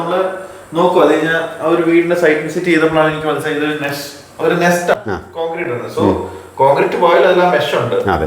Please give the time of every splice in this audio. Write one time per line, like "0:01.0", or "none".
0:04.9

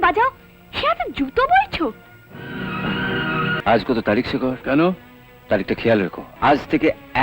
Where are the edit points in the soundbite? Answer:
0:03.6
0:06.2

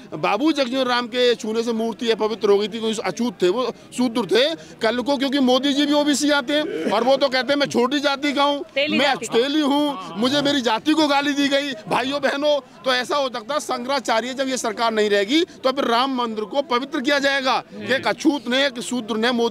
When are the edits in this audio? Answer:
none

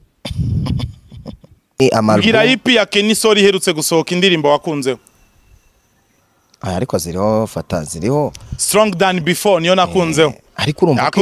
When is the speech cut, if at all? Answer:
0:01.8

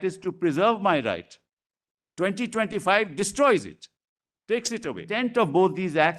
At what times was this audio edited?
0:05.1

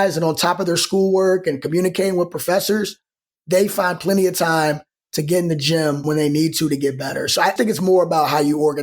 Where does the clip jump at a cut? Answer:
0:06.0
0:07.5

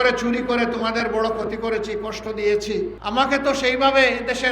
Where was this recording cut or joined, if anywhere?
0:03.0

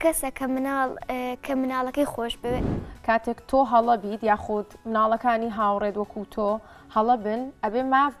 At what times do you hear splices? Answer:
0:02.6

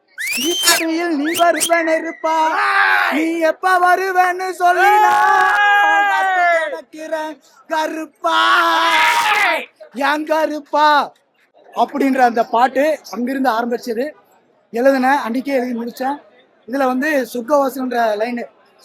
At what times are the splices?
none

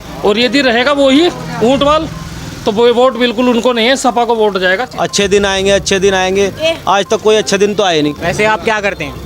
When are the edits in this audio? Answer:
0:04.9
0:08.2

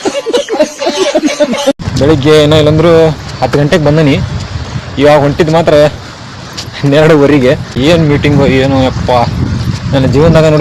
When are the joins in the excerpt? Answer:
0:01.9
0:07.7

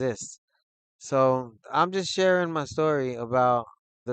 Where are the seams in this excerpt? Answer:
none

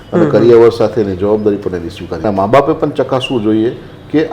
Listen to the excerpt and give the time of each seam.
0:02.2

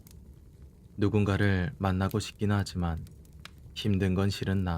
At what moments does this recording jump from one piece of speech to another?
0:01.0

